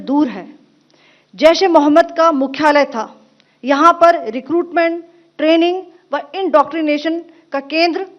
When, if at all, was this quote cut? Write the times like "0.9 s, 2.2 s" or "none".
3.3 s